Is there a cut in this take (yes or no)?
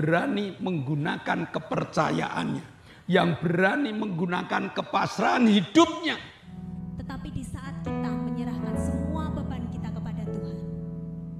yes